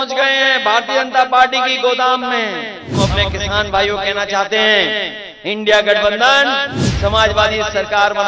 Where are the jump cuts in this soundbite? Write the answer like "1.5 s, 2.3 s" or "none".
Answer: 3.0 s